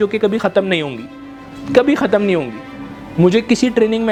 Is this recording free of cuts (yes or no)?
yes